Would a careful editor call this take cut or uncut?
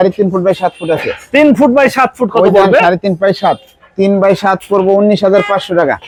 uncut